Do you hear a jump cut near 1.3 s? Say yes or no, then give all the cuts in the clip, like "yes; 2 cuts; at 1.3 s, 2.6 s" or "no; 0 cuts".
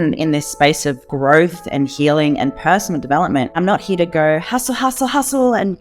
no; 1 cut; at 3.6 s